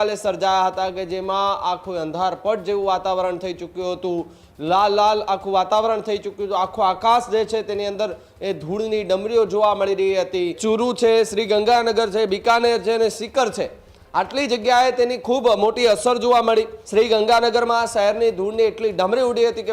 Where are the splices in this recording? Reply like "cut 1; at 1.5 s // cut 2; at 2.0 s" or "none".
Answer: cut 1; at 10.6 s // cut 2; at 16.8 s

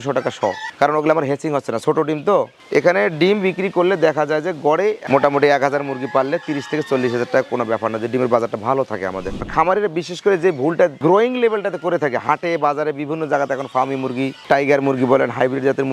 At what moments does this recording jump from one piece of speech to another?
cut 1; at 2.6 s // cut 2; at 5.0 s // cut 3; at 9.4 s

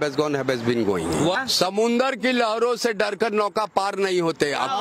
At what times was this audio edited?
cut 1; at 1.4 s

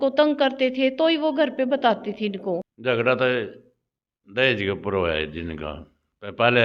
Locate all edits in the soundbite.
cut 1; at 2.7 s

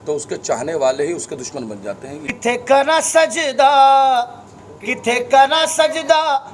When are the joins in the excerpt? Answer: cut 1; at 2.2 s

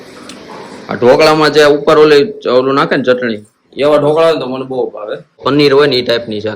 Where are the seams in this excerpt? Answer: cut 1; at 5.4 s

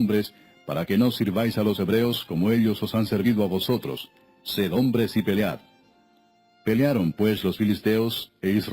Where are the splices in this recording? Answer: cut 1; at 4.7 s

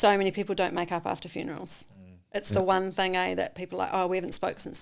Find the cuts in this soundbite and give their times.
none

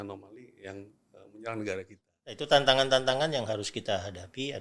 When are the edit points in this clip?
cut 1; at 2.4 s

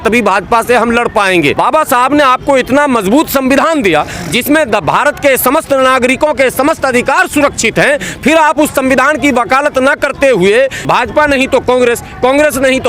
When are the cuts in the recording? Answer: cut 1; at 1.5 s // cut 2; at 10.8 s

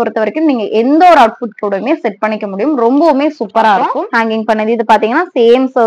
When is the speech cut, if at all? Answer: cut 1; at 4.4 s

